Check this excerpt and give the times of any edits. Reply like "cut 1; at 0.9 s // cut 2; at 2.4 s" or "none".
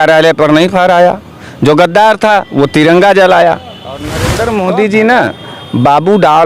cut 1; at 4.2 s